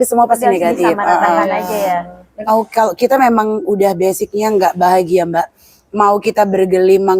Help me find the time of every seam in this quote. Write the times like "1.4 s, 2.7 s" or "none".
2.5 s